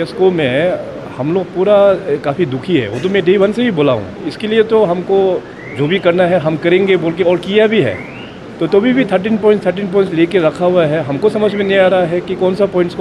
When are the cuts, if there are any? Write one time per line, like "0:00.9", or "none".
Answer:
none

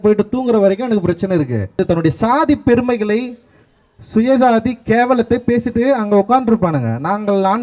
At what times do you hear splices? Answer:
0:01.7

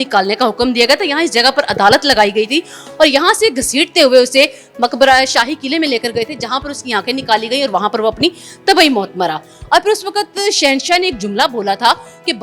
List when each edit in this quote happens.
none

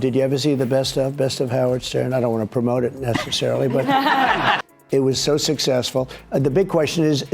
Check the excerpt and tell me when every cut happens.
0:04.7

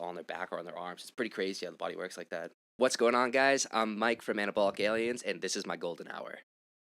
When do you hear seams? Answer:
0:02.6

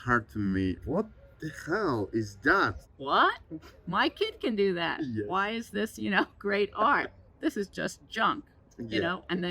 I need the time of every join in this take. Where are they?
0:00.8
0:02.8
0:07.2

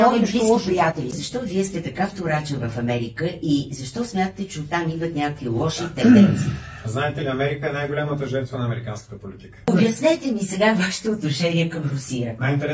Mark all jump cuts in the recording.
0:01.2
0:09.7

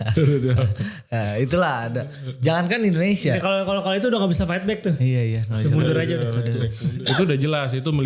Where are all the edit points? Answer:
0:06.8

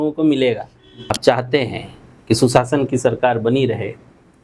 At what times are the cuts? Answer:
0:01.1

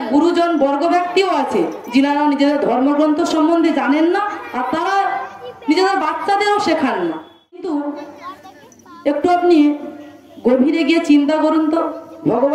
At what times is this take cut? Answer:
0:07.6

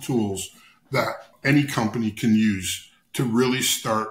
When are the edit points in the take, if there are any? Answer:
0:01.3

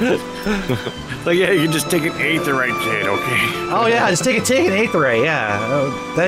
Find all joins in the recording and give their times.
none

